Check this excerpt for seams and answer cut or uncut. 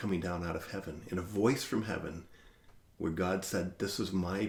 uncut